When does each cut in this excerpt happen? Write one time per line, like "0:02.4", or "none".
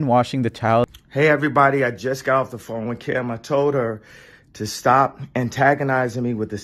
0:00.9

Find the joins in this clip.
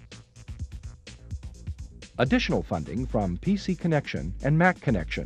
0:02.1

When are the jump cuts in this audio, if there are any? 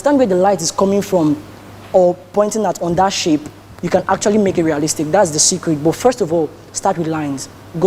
none

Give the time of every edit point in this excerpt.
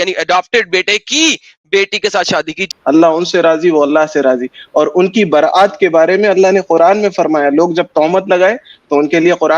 0:02.6

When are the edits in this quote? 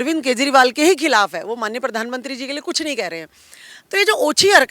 none

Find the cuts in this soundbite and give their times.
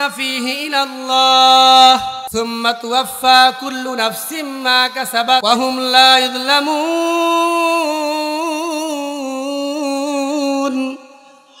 0:02.2
0:05.4

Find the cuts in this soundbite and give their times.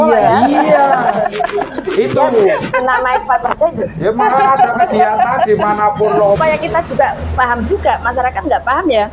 0:06.4

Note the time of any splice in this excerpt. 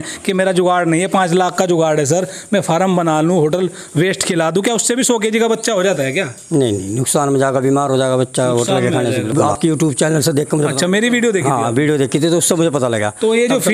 0:09.3

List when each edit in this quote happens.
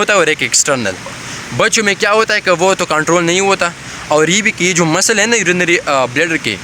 none

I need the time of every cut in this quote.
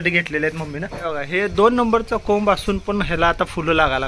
0:00.9

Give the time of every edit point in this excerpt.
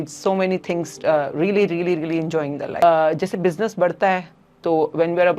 0:02.8

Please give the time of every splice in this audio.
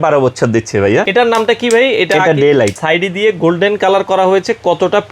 0:01.1
0:02.8

